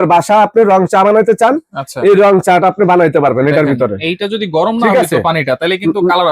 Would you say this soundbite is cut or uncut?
uncut